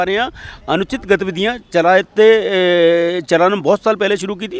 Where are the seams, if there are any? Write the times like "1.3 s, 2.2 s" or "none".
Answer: none